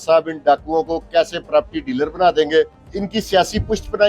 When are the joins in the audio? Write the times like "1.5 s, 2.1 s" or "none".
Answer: 2.8 s